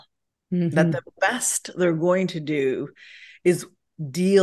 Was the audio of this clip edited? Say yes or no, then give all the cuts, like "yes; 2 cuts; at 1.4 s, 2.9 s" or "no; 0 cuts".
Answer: no; 0 cuts